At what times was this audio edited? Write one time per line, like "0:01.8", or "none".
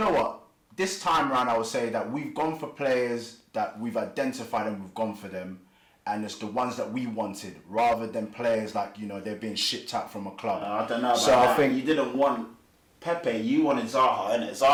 none